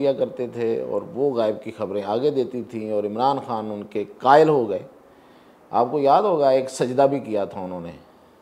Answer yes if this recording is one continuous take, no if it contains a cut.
yes